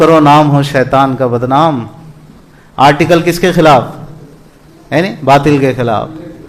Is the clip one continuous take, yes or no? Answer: yes